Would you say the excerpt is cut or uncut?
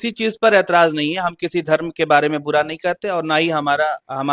uncut